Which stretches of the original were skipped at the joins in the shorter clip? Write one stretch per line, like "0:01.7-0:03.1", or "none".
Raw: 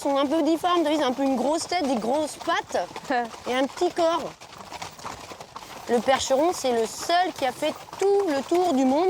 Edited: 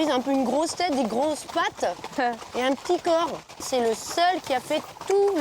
0:04.6-0:06.6